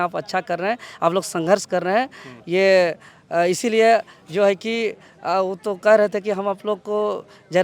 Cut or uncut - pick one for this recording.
uncut